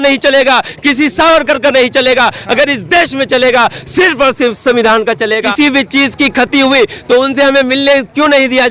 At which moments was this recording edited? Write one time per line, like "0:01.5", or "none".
0:05.5